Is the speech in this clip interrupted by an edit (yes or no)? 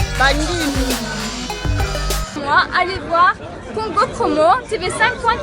yes